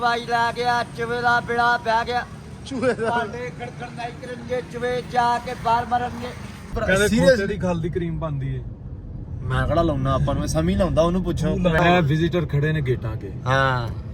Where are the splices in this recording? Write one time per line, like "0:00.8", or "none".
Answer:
0:06.7
0:11.8